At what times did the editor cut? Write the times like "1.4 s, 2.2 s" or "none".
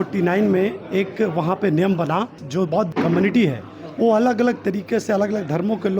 2.7 s